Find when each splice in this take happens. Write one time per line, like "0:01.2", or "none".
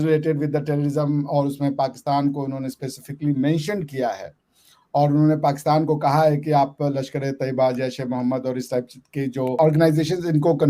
0:09.6